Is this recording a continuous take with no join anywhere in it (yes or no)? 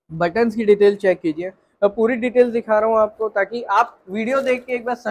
yes